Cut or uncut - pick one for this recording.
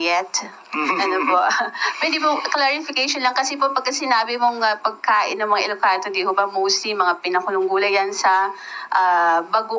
uncut